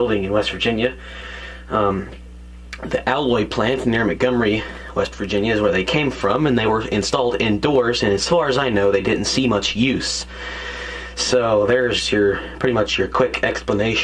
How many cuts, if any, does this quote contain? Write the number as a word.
zero